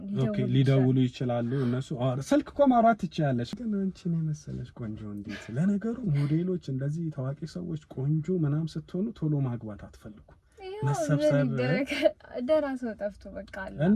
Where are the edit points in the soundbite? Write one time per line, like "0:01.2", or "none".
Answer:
0:03.6